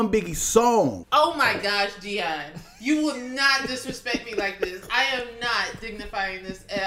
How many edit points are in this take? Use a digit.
1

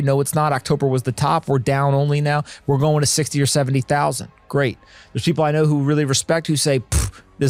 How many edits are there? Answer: 0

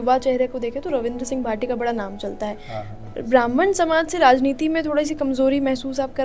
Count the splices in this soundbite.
0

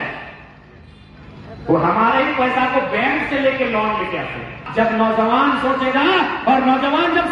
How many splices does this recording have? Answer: 1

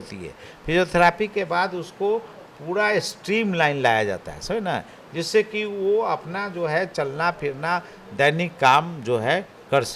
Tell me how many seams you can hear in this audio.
0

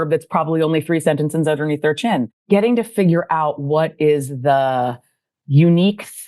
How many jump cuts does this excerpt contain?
1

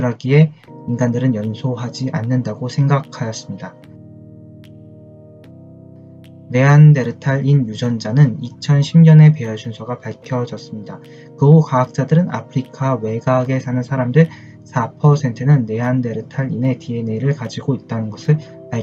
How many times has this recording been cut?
1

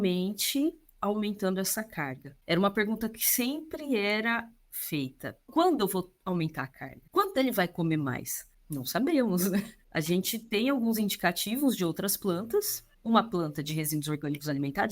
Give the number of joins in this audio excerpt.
2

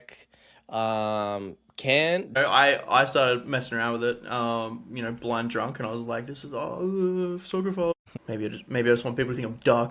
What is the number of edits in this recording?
2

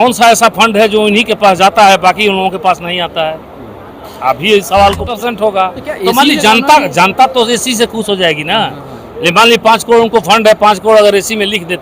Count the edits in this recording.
1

